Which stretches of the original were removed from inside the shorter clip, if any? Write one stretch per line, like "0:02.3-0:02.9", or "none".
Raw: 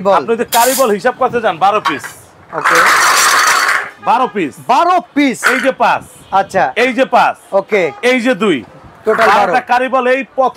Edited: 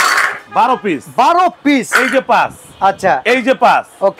none